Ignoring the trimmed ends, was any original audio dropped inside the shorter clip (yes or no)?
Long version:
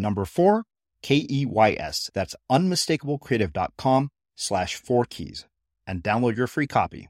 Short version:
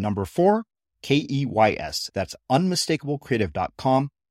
no